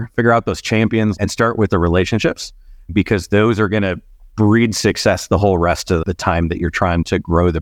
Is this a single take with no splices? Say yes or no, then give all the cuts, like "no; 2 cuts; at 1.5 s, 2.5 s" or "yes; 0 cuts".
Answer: no; 1 cut; at 1.1 s